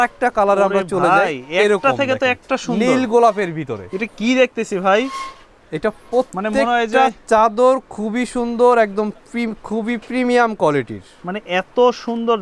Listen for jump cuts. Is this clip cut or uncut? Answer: uncut